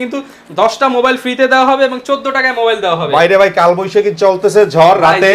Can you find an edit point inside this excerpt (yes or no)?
no